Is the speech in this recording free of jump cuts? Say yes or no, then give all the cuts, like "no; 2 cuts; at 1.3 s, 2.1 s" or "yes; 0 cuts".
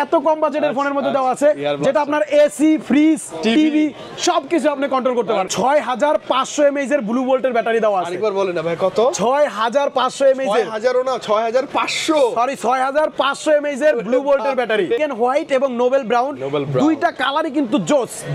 no; 2 cuts; at 5.5 s, 15.0 s